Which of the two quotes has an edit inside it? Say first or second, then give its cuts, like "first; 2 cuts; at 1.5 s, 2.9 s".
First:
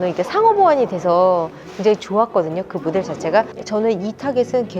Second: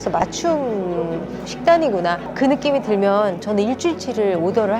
first; 1 cut; at 3.5 s